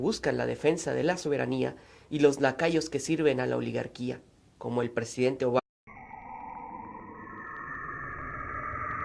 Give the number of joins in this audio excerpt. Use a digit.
0